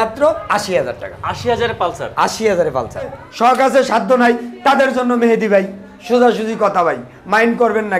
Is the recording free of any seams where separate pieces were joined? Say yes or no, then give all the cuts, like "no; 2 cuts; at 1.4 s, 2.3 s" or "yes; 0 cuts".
no; 1 cut; at 3.2 s